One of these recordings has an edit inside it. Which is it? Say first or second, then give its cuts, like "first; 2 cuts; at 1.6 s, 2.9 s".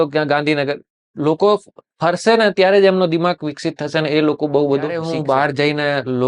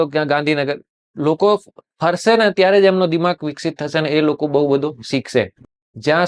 first; 1 cut; at 5.1 s